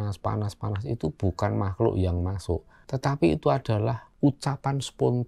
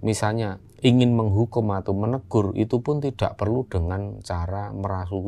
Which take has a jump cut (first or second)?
first